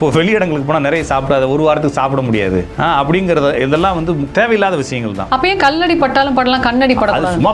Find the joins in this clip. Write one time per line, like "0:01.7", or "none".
0:04.3